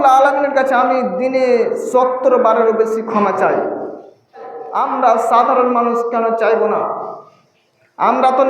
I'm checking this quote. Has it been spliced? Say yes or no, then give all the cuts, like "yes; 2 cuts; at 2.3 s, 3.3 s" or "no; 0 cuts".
yes; 1 cut; at 4.6 s